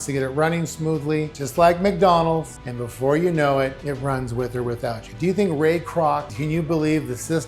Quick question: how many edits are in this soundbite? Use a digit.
3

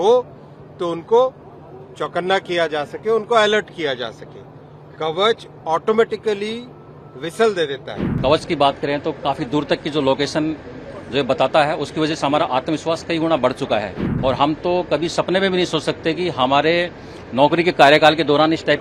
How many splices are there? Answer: 2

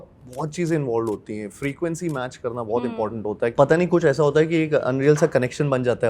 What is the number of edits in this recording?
1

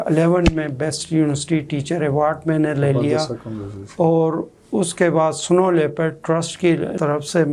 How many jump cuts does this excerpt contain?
0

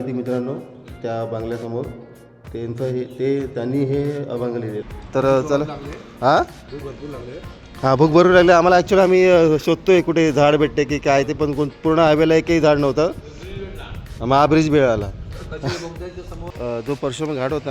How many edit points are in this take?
2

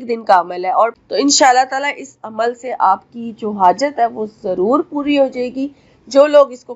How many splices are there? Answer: 1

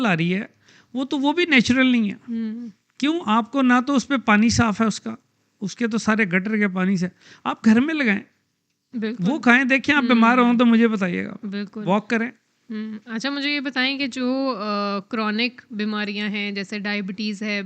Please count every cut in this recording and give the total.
0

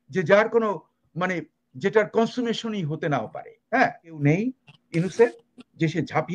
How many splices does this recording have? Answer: 1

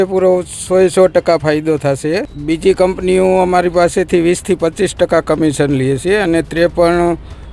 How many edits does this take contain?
1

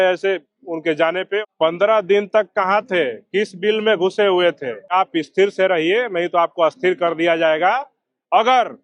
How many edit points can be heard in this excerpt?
2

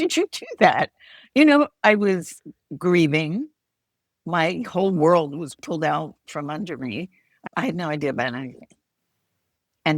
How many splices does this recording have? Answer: 1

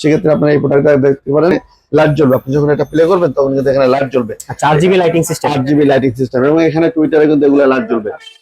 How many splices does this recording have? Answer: 1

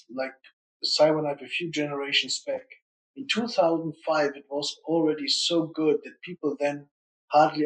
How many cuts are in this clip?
0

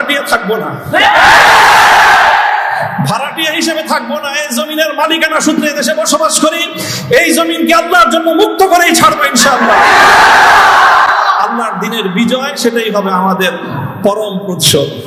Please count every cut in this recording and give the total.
0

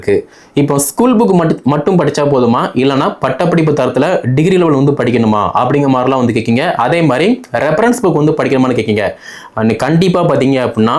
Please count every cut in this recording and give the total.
0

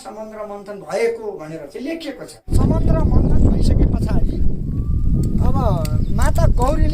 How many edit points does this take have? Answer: 1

